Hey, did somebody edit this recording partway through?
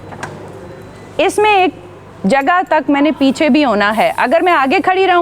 no; 0 cuts

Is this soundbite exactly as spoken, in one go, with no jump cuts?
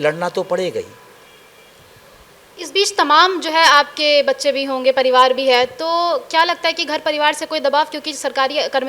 yes; 0 cuts

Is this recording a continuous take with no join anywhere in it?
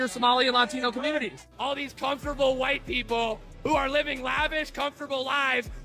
no; 1 cut; at 1.5 s

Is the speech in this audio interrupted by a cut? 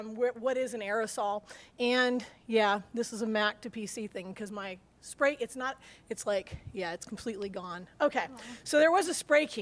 no; 0 cuts

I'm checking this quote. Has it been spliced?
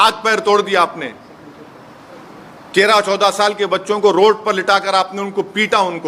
no; 0 cuts

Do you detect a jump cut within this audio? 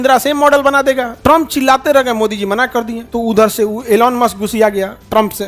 yes; 2 cuts; at 1.1 s, 3.0 s

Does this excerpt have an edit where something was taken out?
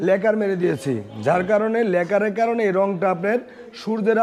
no; 0 cuts

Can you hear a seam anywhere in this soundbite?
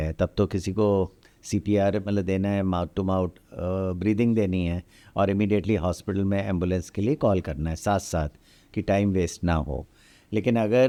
no; 0 cuts

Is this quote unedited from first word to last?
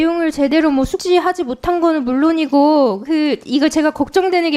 no; 1 cut; at 1.0 s

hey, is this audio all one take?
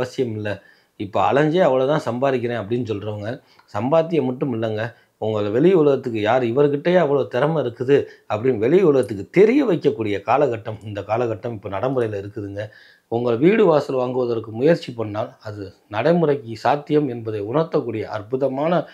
no; 1 cut; at 12.9 s

